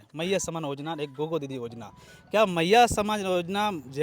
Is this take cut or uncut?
uncut